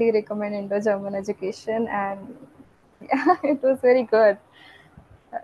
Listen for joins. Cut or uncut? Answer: uncut